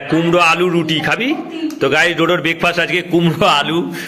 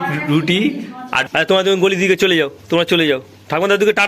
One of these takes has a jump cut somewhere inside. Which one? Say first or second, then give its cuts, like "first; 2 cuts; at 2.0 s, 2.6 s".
second; 1 cut; at 1.2 s